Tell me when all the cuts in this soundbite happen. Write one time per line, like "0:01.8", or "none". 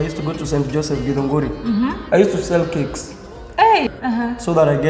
0:03.9